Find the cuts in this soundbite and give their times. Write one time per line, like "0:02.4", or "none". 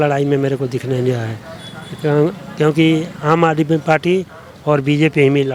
none